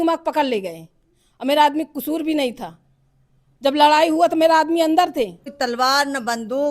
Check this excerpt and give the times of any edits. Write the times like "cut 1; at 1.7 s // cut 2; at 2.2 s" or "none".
cut 1; at 5.5 s